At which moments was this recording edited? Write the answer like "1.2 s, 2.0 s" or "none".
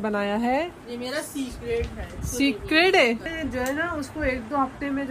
3.3 s

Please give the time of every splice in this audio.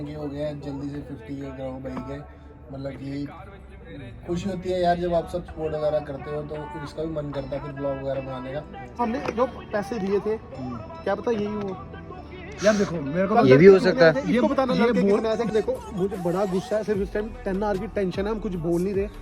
9.0 s, 15.5 s

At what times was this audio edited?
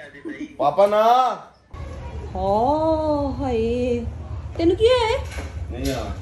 1.7 s

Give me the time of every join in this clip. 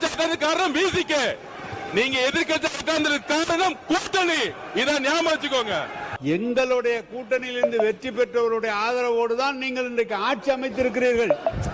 6.0 s

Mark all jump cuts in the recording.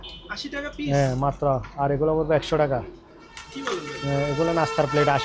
none

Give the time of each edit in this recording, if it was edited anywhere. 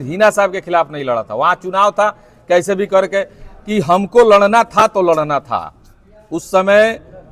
none

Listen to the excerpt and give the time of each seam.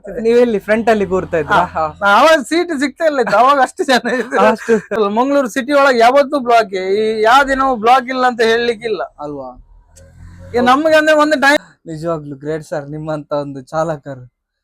5.0 s, 11.6 s

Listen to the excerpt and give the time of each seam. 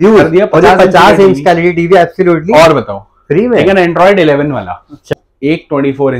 5.1 s

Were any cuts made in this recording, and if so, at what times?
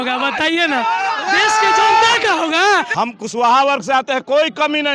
2.9 s

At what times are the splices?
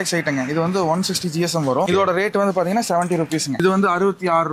1.9 s, 3.5 s

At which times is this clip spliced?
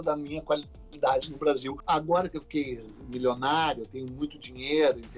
1.7 s

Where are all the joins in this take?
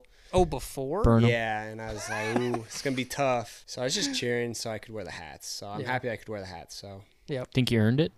3.6 s

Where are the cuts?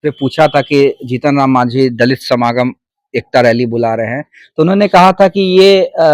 none

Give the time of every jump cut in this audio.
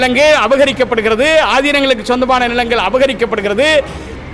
none

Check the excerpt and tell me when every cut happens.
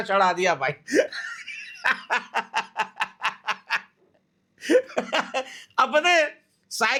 none

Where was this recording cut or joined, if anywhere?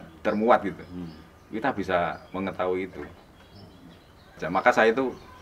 4.4 s

